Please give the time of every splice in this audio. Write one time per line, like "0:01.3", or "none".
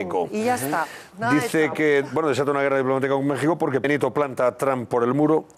none